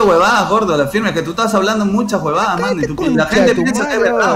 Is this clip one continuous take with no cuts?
yes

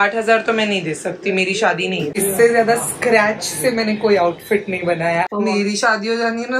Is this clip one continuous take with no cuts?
no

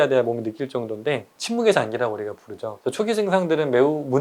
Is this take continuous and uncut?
no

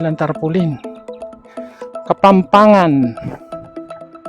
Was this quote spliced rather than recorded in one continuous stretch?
yes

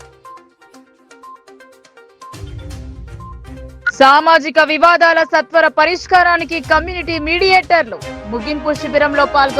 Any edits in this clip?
yes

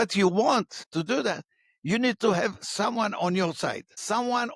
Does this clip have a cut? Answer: no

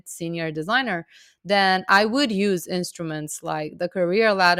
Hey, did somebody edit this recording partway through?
no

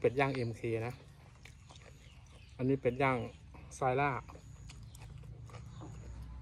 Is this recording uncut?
yes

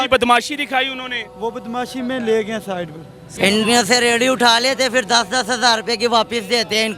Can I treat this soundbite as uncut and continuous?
no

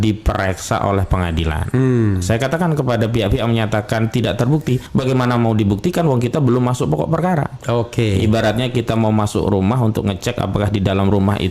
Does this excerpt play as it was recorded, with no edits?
no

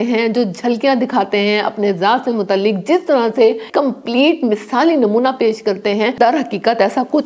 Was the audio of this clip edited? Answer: yes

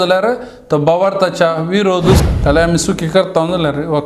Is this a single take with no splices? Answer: no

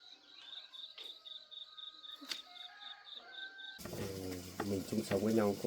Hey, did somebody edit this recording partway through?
yes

